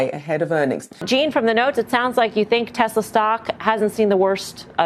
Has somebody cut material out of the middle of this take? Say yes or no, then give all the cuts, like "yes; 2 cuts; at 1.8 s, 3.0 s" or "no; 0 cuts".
yes; 1 cut; at 1.0 s